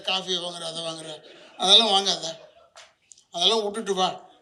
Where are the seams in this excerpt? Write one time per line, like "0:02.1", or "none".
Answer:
none